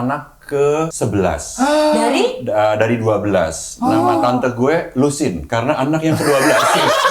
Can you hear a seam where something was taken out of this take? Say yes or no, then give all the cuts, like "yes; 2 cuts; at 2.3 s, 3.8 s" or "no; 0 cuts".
yes; 1 cut; at 0.9 s